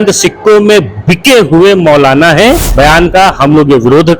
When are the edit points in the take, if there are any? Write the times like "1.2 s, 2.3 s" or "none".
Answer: 2.7 s